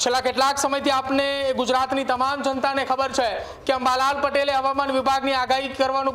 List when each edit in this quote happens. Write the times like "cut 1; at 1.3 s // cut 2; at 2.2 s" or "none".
none